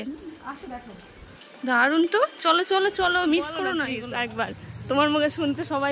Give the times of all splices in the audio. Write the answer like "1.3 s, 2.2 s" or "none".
3.9 s